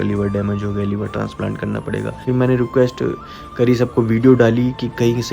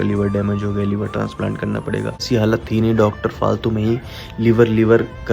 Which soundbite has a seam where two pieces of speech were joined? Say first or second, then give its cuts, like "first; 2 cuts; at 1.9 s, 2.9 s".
second; 1 cut; at 2.2 s